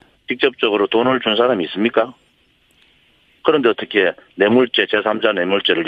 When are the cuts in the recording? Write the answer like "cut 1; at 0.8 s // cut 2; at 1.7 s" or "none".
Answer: none